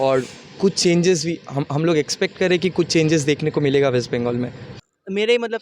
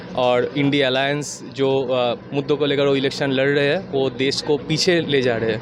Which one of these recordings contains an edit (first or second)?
first